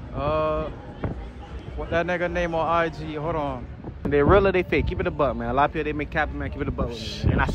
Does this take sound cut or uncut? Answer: cut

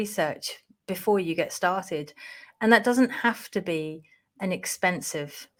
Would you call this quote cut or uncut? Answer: uncut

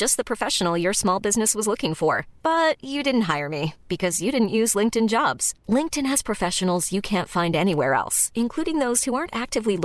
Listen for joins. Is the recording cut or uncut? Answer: uncut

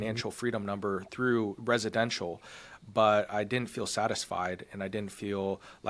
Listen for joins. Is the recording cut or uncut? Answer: uncut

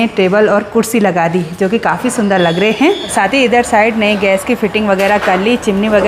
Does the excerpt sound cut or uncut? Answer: uncut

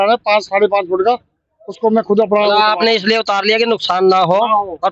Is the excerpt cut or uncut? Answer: uncut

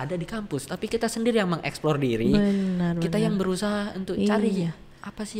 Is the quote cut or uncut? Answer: uncut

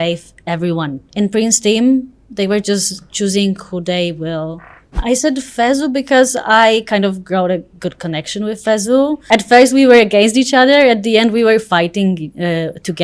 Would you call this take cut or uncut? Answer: cut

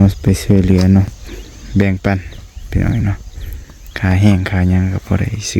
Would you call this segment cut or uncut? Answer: cut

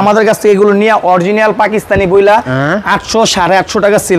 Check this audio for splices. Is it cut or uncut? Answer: uncut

